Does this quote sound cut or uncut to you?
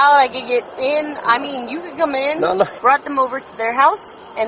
cut